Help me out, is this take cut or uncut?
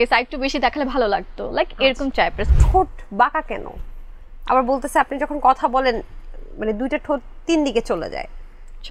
cut